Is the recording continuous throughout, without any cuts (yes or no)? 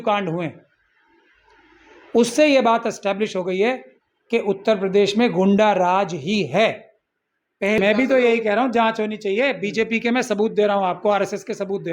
no